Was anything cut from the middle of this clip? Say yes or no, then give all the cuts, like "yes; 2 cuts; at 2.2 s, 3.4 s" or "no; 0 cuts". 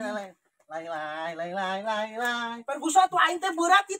no; 0 cuts